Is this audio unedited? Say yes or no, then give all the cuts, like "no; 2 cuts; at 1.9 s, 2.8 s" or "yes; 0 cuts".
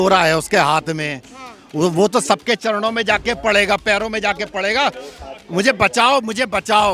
yes; 0 cuts